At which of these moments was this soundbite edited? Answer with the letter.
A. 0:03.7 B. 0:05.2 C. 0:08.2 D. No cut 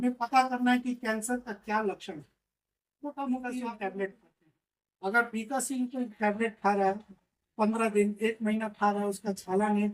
A